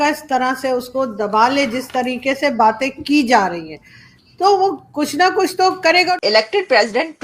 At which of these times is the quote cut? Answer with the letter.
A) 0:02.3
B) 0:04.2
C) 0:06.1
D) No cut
C